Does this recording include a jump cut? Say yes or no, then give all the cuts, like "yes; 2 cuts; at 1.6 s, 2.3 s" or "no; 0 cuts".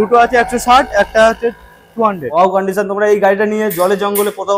yes; 1 cut; at 2.2 s